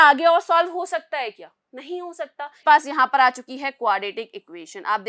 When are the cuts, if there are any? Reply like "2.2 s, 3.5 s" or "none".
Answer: 2.6 s